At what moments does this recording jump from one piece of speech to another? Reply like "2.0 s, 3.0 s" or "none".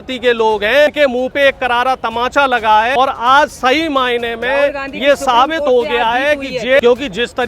0.9 s, 2.9 s, 6.8 s